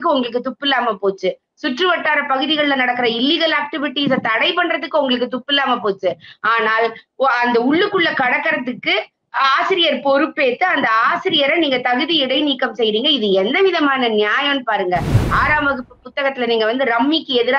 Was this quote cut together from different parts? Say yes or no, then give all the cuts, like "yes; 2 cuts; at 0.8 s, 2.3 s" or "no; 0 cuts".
yes; 1 cut; at 15.2 s